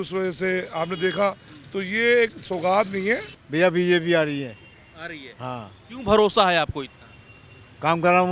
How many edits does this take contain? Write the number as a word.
one